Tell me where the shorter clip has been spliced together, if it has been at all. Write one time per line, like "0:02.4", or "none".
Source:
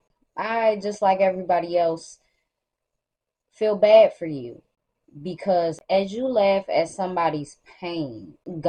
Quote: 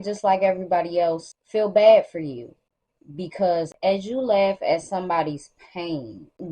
0:01.3